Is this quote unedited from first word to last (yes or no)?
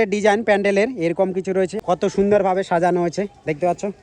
no